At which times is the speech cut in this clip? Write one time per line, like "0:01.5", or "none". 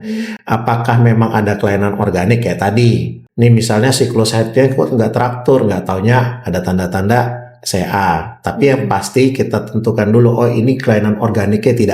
0:03.2